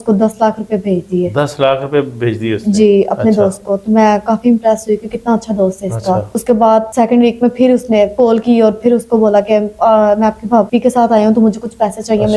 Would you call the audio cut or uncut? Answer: uncut